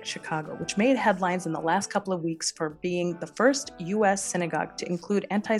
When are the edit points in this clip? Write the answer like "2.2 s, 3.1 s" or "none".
none